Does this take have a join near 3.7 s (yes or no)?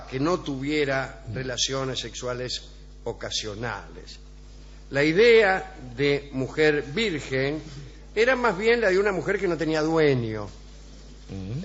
no